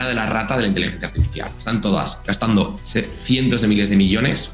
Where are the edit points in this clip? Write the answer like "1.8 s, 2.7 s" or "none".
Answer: 1.5 s, 2.2 s, 2.8 s